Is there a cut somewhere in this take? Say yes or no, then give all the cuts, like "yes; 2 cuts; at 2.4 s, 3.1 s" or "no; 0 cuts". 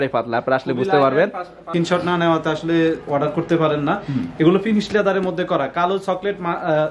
yes; 1 cut; at 1.7 s